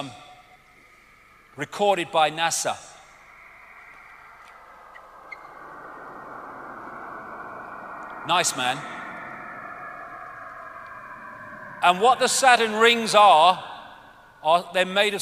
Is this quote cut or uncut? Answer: uncut